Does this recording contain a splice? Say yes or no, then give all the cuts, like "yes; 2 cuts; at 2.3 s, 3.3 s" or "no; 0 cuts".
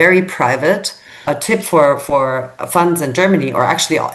yes; 1 cut; at 1.3 s